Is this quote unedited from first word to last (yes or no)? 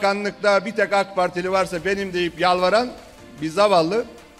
yes